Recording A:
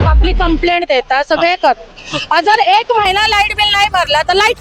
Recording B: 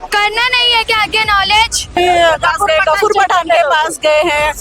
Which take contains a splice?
B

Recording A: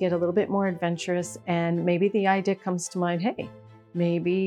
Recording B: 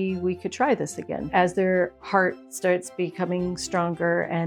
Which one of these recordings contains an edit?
B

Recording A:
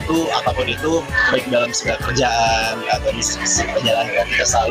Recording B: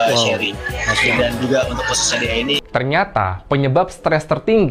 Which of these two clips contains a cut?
B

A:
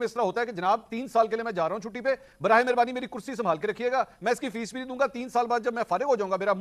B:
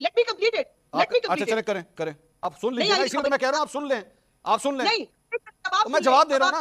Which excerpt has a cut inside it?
B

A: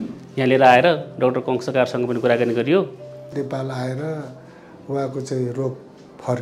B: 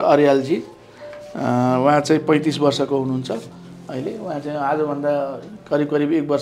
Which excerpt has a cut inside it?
A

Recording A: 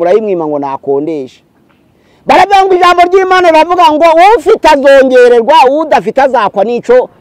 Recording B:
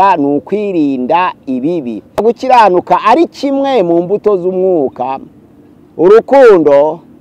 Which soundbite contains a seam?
B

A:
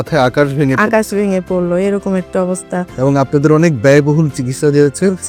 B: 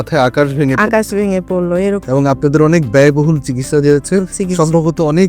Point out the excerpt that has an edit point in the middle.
B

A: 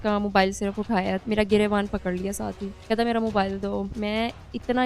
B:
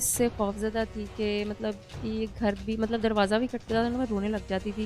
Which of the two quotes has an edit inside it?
A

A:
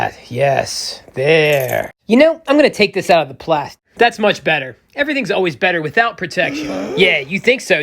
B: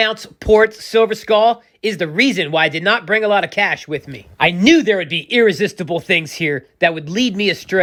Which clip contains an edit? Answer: A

